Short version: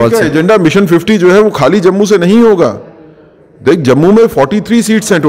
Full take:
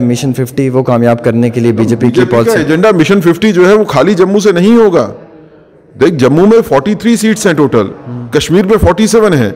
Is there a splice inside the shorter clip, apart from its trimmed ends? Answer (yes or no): no